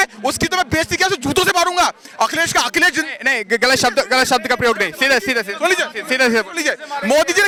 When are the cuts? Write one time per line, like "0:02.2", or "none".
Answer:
none